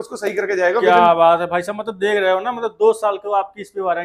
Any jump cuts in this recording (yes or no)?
no